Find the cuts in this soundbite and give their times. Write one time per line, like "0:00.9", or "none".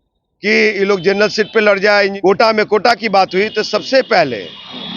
0:02.1